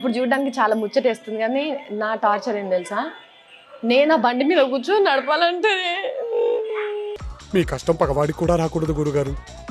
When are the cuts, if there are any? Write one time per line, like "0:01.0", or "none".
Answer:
none